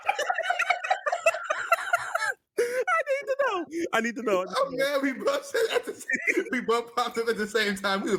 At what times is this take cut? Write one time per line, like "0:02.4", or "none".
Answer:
none